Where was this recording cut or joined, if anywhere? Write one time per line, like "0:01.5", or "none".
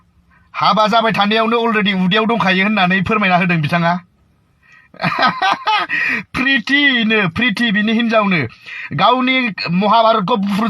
none